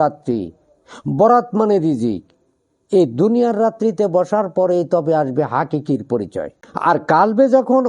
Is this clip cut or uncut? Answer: cut